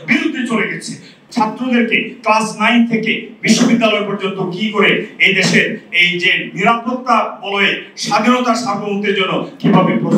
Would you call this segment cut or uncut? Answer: cut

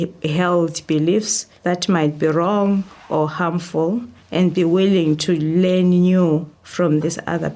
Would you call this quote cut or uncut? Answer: uncut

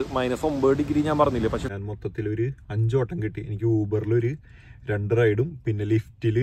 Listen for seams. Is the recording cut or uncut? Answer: cut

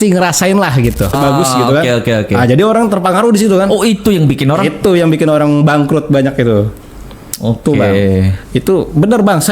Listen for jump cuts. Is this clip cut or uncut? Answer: cut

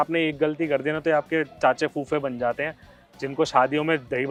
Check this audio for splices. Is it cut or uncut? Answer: uncut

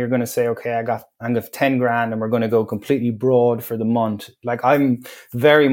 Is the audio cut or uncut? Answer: uncut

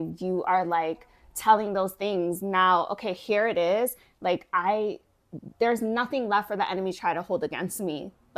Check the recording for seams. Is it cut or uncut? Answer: uncut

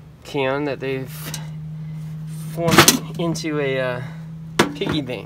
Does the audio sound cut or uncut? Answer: uncut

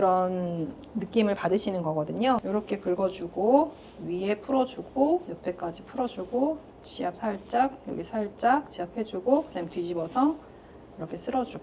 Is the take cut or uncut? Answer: cut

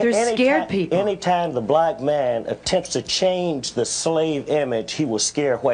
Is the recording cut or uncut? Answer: uncut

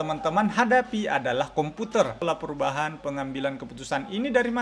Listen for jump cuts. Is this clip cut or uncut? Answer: cut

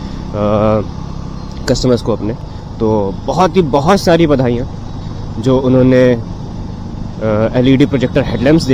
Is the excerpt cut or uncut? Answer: uncut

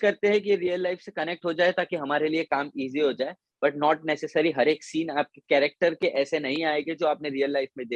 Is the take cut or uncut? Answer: uncut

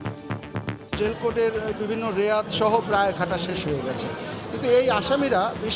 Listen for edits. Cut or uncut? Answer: cut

